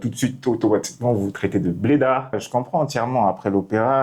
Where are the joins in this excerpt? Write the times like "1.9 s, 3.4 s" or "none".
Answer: 2.4 s